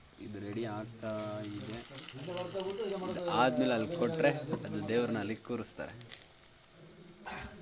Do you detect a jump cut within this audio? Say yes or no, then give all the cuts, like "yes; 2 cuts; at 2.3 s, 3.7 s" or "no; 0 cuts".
no; 0 cuts